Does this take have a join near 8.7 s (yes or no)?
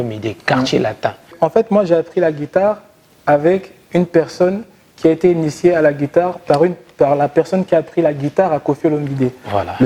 no